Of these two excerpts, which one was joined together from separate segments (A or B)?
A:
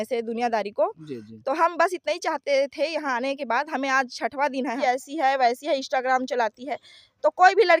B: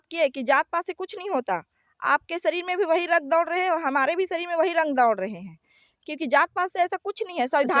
A